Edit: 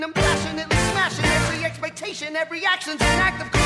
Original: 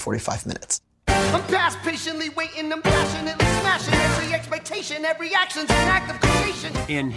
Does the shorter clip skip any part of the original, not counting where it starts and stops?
no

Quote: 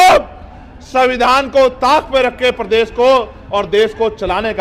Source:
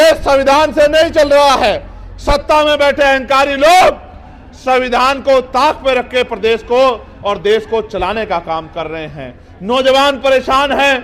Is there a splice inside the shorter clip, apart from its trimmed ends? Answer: no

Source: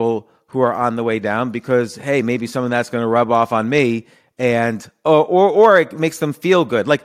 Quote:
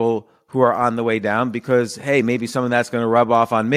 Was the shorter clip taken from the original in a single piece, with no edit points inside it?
yes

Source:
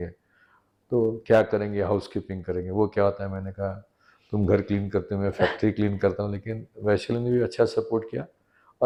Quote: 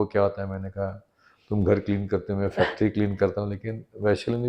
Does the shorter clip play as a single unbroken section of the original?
yes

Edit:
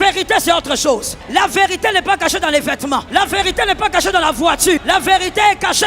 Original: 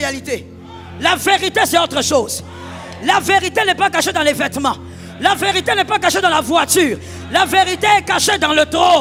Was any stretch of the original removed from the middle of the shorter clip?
yes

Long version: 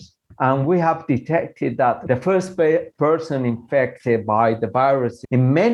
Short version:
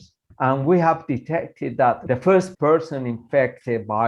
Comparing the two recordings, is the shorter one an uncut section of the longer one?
no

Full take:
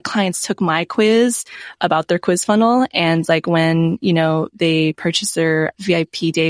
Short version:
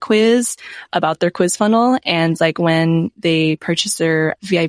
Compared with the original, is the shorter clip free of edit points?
no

